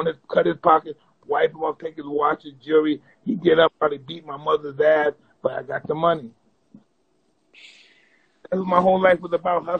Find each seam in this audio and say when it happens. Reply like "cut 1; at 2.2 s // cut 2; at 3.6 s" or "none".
none